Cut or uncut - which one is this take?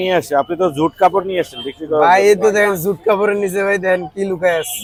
uncut